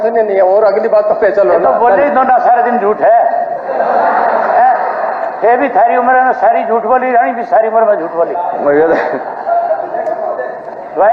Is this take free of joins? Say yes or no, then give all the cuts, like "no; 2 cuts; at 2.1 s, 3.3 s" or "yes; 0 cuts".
yes; 0 cuts